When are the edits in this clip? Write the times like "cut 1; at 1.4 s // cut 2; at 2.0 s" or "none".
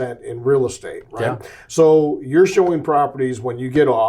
none